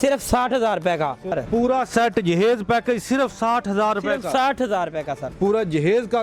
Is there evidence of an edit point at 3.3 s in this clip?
no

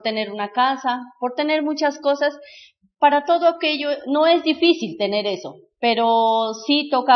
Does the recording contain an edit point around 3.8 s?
yes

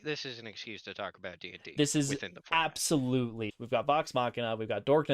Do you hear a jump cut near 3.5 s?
yes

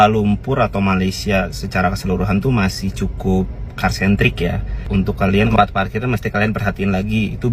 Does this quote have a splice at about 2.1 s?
no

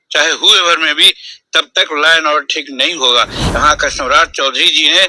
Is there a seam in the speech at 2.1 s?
no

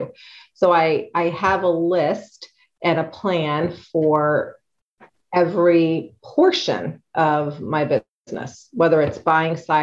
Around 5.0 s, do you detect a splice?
no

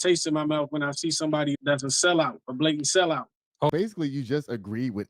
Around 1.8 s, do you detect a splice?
no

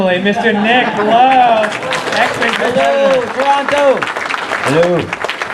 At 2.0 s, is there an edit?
yes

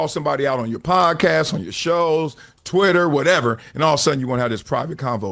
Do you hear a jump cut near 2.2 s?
no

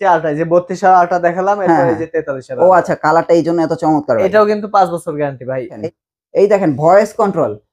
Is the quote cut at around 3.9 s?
no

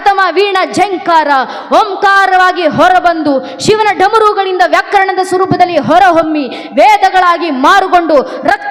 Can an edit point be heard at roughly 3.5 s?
no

